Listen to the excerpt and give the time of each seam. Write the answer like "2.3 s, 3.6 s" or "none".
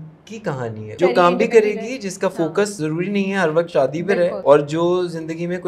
1.0 s, 2.8 s, 4.4 s